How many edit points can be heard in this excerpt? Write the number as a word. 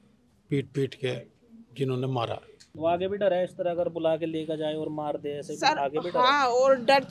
one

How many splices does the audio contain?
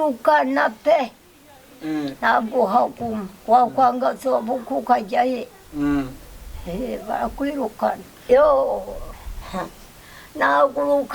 one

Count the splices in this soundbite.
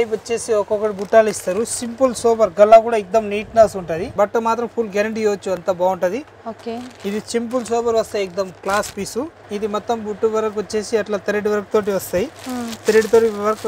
two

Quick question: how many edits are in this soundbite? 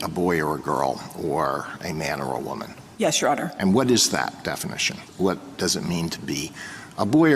two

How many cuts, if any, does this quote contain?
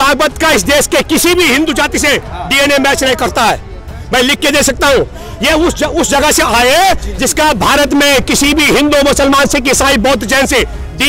zero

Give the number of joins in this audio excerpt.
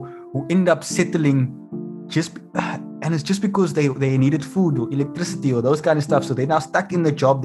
zero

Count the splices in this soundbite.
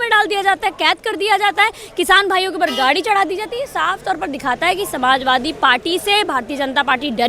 zero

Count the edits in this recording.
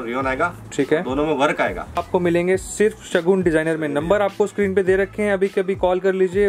one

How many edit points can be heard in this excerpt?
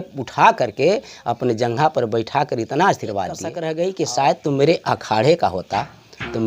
one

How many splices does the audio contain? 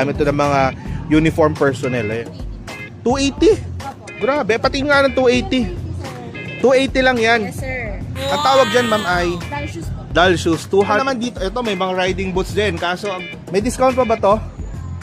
three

